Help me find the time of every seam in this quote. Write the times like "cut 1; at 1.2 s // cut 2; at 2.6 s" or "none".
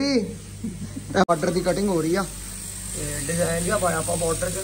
cut 1; at 1.3 s